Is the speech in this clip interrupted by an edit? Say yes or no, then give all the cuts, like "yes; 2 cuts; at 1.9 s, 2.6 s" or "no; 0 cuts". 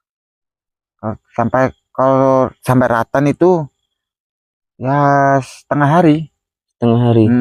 no; 0 cuts